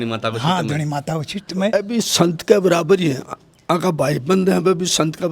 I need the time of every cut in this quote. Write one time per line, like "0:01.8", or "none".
0:01.7